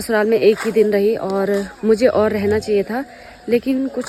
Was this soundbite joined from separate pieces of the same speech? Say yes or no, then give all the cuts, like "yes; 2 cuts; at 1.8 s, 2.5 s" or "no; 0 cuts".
no; 0 cuts